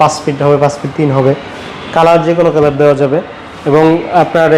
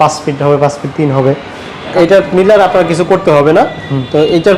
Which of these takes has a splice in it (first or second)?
second